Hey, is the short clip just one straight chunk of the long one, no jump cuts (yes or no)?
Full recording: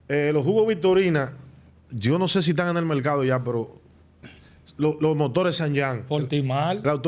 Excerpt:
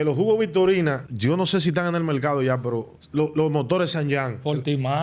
no